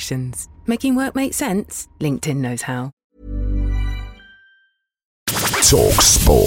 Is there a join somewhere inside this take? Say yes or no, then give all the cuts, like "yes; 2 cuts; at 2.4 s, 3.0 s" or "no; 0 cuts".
yes; 2 cuts; at 2.9 s, 5.3 s